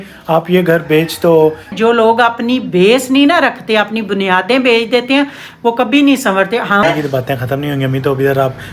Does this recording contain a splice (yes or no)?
yes